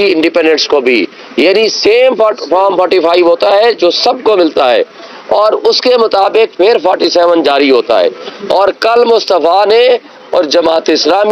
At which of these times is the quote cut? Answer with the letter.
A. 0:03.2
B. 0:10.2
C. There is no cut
C